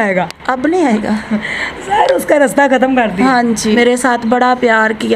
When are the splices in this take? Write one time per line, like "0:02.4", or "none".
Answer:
0:03.8